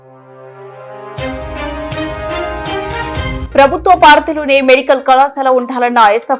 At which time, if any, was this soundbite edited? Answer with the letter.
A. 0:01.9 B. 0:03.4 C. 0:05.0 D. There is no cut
B